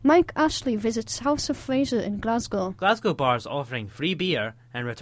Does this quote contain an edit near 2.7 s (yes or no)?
yes